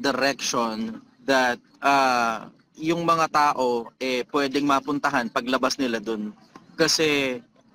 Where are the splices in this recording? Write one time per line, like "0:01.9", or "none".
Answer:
0:01.7